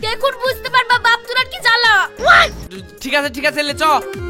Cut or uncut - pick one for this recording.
uncut